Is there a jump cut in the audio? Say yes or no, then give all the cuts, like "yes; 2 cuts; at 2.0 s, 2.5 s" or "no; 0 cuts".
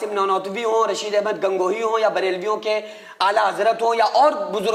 no; 0 cuts